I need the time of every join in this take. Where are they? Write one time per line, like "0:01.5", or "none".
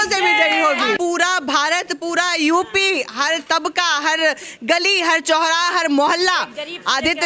0:01.0